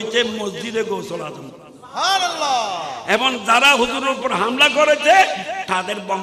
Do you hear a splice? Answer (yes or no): no